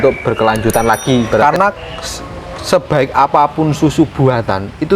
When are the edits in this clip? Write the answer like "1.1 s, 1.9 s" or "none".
1.4 s